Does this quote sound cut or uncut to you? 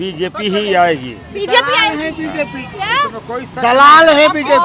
uncut